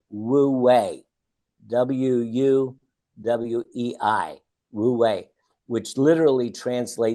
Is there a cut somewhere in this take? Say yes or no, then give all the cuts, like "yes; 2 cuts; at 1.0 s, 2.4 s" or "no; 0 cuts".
no; 0 cuts